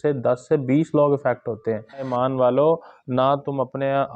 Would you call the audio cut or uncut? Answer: cut